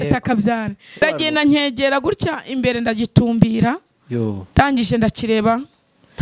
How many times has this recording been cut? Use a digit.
1